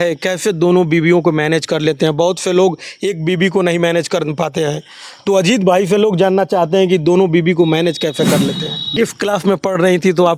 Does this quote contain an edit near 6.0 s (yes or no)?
no